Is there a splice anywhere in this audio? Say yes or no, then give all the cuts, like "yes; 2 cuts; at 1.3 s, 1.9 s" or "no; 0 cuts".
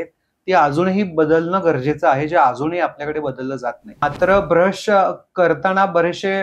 yes; 1 cut; at 4.0 s